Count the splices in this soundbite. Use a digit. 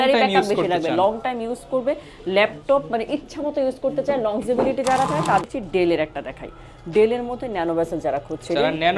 1